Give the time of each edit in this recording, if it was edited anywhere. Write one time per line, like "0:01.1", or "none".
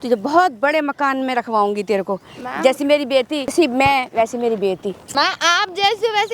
0:03.5
0:05.0